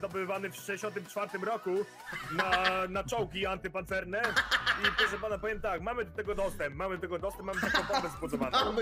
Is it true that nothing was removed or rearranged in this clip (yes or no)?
yes